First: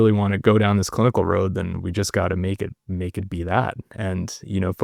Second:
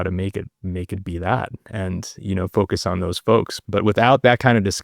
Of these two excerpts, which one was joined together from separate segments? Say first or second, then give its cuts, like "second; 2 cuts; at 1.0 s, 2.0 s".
second; 1 cut; at 3.5 s